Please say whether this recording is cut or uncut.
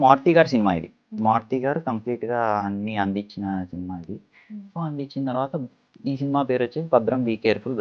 uncut